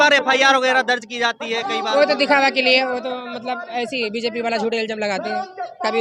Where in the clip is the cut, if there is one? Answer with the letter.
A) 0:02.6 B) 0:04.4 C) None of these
C